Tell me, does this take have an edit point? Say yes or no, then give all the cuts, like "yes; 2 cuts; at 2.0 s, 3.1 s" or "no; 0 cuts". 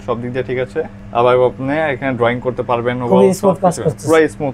no; 0 cuts